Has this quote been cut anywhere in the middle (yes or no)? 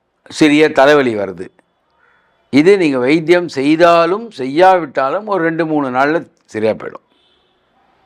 no